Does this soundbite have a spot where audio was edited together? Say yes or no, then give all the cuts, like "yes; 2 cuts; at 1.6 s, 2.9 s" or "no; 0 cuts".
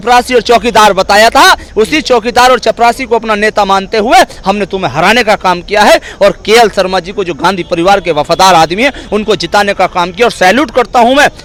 no; 0 cuts